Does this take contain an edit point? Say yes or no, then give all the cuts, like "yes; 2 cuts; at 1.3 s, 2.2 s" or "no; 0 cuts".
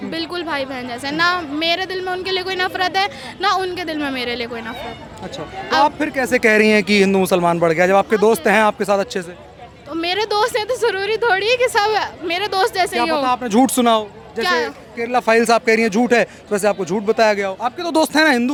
no; 0 cuts